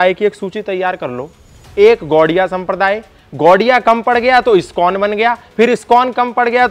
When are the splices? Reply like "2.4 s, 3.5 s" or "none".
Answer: none